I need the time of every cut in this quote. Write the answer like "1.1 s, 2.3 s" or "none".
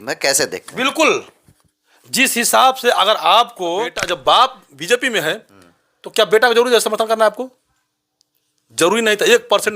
4.0 s